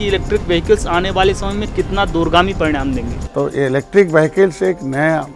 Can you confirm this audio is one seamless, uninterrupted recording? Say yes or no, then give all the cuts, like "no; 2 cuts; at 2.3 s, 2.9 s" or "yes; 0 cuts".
no; 1 cut; at 3.2 s